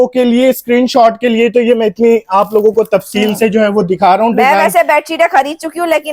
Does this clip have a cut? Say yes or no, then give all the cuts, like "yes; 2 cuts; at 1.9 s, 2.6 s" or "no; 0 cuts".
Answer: no; 0 cuts